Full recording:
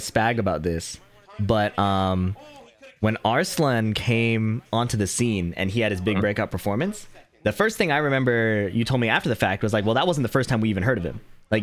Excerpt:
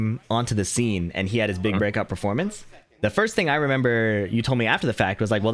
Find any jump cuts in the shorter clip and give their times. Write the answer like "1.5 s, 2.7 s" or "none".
none